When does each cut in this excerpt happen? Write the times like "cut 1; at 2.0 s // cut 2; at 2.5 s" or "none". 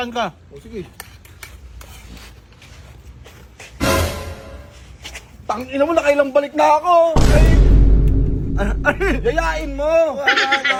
none